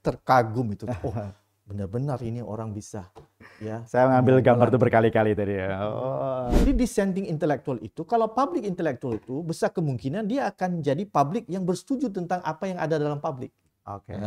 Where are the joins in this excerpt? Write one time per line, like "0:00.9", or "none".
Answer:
0:06.6